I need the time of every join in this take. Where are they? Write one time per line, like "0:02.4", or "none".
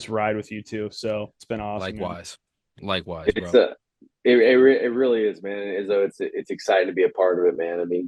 none